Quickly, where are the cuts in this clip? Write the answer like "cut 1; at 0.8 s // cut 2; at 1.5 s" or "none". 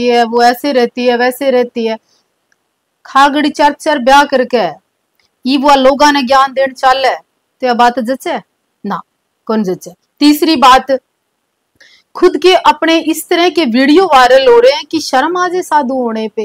none